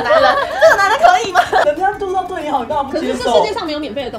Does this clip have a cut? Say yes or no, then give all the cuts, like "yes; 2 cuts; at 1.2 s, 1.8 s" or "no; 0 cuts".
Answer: yes; 1 cut; at 1.6 s